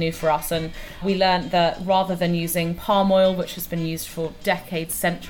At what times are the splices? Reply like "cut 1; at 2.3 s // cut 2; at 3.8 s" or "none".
cut 1; at 1.0 s // cut 2; at 4.4 s